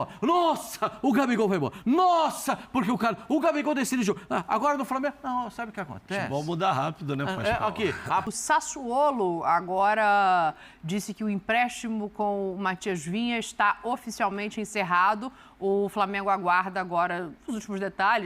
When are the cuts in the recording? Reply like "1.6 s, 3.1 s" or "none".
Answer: 8.2 s